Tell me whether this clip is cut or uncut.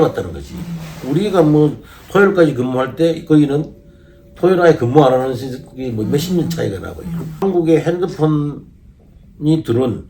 cut